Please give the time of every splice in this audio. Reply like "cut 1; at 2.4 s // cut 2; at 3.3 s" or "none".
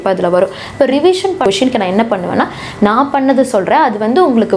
cut 1; at 1.4 s